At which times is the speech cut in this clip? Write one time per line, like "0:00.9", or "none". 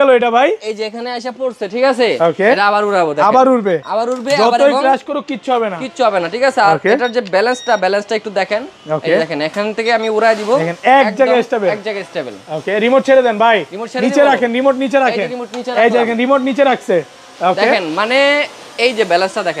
none